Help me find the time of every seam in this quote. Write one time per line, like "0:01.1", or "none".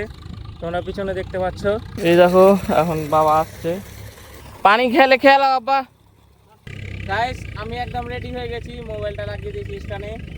0:01.9
0:06.7